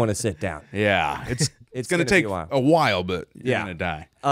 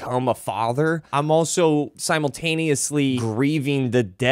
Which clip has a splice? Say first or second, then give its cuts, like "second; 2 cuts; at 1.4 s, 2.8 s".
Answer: second; 3 cuts; at 1.0 s, 2.0 s, 3.2 s